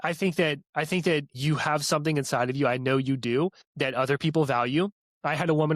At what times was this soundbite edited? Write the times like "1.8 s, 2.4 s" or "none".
1.3 s, 3.6 s